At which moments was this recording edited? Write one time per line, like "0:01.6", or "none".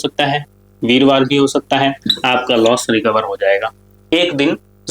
0:02.1
0:04.1